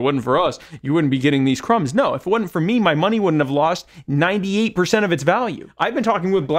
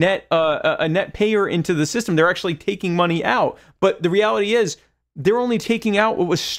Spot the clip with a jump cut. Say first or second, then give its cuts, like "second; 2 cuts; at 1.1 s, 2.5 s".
first; 1 cut; at 5.7 s